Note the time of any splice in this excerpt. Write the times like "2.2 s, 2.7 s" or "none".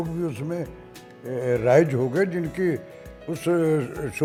none